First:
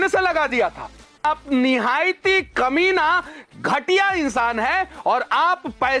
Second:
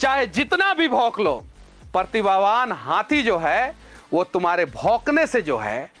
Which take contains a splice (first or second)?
first